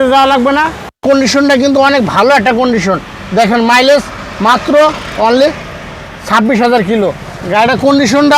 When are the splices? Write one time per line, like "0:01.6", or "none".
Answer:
0:01.0